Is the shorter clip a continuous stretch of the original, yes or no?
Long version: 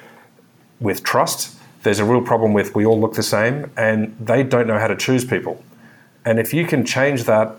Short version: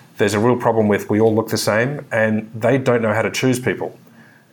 yes